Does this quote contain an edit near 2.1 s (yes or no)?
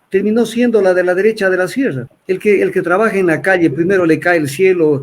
yes